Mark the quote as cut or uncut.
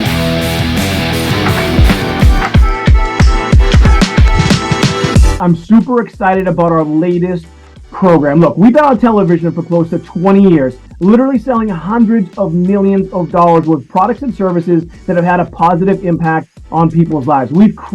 cut